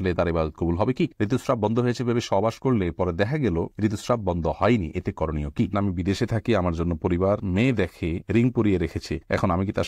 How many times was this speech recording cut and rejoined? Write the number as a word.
two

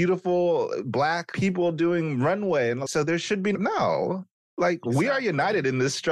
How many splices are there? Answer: one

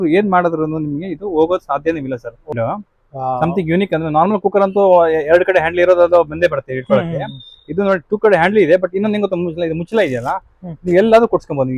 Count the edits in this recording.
one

